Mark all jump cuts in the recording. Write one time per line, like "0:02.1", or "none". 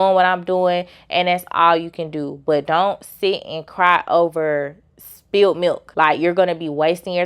0:05.8